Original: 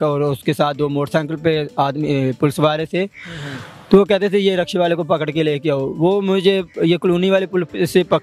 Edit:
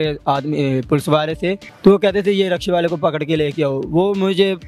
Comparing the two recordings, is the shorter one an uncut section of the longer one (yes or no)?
no